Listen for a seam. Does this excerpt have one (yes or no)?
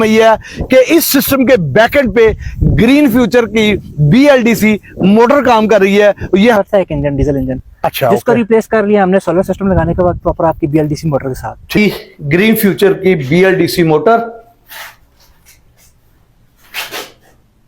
yes